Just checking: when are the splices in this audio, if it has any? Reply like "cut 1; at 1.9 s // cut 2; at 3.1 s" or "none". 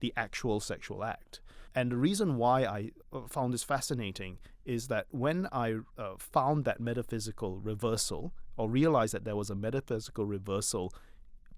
cut 1; at 1.7 s // cut 2; at 3.0 s // cut 3; at 5.9 s